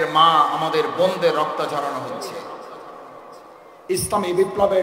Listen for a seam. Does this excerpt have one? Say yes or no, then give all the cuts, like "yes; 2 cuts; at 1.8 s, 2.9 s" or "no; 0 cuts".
yes; 1 cut; at 3.5 s